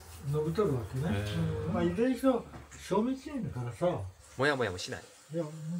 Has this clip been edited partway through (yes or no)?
yes